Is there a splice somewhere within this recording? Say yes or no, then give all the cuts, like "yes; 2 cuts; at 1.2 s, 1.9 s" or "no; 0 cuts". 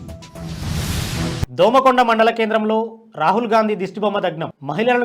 yes; 1 cut; at 1.4 s